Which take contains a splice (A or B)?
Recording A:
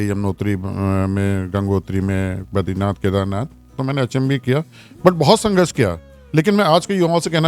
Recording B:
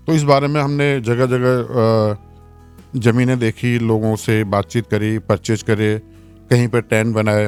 A